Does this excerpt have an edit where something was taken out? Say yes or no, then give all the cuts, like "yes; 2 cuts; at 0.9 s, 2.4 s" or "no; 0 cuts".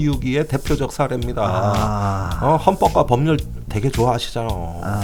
no; 0 cuts